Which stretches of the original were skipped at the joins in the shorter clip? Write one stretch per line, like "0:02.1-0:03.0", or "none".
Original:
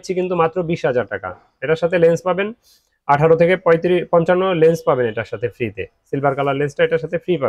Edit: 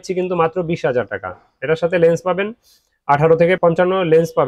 0:03.6-0:04.1